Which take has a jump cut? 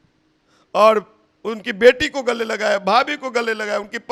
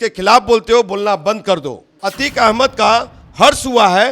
second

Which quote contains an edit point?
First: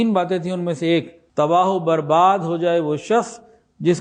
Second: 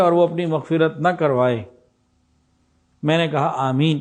first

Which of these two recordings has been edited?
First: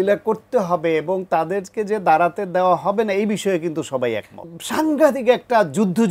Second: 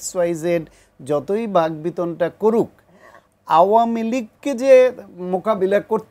first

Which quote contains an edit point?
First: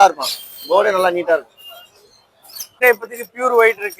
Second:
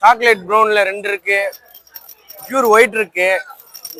first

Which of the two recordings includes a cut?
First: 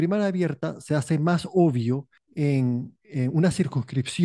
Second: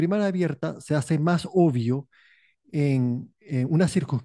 first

